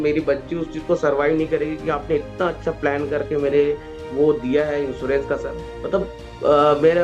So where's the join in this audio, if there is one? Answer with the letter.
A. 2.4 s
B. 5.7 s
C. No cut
B